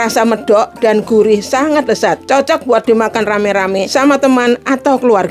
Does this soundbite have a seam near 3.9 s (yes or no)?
yes